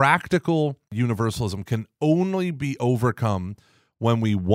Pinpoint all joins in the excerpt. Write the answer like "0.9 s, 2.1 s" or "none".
0.9 s